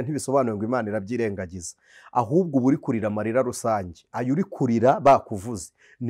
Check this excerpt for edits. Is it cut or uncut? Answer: uncut